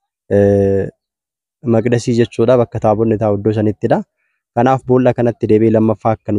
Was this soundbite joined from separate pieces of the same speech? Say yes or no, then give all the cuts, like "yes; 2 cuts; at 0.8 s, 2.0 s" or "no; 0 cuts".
no; 0 cuts